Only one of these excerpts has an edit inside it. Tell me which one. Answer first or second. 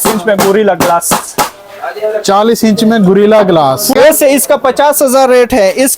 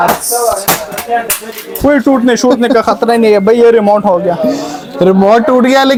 first